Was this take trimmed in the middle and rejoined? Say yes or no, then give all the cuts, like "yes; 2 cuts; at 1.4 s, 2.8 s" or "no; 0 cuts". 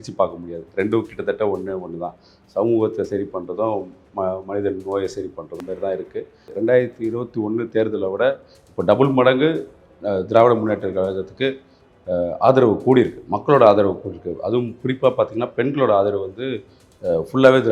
yes; 1 cut; at 6.5 s